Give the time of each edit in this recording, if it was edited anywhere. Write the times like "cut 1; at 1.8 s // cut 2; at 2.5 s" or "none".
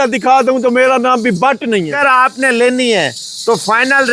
cut 1; at 1.9 s